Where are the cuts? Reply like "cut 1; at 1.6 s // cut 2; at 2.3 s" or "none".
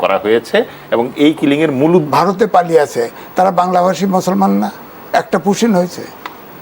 cut 1; at 2.1 s